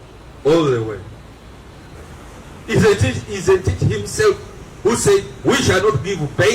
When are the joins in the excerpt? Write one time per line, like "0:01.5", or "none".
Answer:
0:02.0